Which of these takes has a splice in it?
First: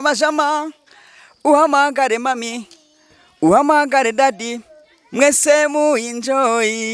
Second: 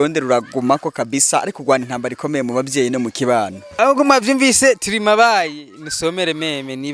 second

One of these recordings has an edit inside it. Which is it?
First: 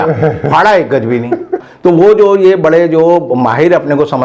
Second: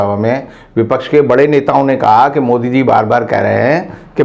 first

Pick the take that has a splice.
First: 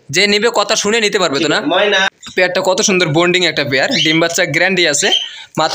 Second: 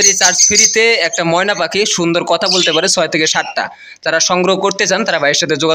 first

